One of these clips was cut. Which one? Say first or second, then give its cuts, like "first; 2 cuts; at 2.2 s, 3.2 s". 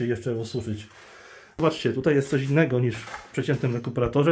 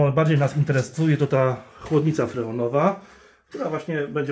first; 1 cut; at 1.6 s